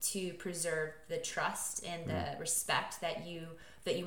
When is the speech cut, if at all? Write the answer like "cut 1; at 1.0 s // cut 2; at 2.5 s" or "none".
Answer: none